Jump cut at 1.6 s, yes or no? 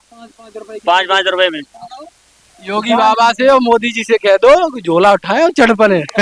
yes